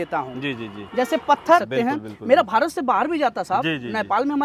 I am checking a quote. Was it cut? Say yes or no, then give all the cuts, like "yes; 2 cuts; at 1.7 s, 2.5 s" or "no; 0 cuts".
yes; 1 cut; at 1.6 s